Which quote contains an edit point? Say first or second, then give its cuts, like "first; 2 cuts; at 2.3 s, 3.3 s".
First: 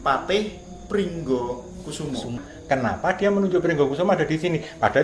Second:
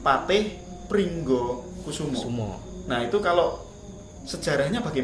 first; 1 cut; at 2.5 s